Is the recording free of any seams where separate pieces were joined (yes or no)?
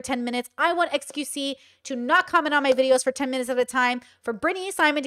yes